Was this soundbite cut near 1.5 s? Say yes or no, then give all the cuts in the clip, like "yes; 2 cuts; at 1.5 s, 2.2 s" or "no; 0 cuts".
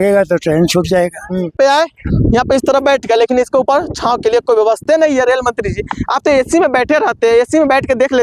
yes; 1 cut; at 1.5 s